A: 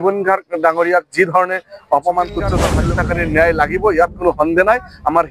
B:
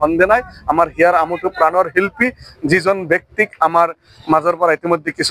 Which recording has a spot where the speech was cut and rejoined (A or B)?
A